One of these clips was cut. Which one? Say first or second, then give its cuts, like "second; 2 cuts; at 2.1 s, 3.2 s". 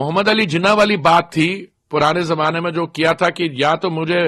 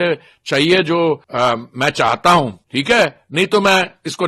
second; 2 cuts; at 1.3 s, 2.6 s